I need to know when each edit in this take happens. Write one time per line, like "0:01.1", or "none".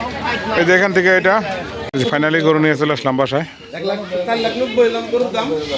0:01.9